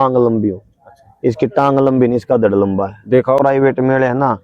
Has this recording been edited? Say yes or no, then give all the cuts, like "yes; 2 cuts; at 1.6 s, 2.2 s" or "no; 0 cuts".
yes; 1 cut; at 3.4 s